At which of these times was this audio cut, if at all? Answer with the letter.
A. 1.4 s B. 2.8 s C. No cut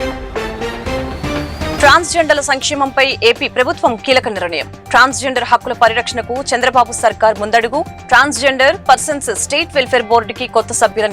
A